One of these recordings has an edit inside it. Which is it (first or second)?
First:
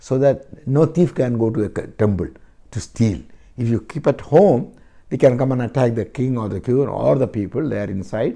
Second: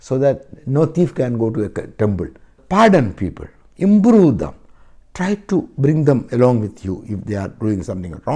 second